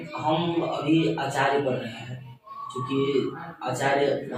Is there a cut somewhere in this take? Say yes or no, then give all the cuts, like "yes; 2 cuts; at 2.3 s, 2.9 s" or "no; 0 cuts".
no; 0 cuts